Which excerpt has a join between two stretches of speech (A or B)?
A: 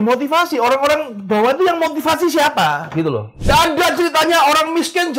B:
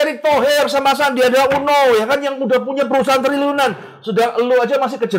A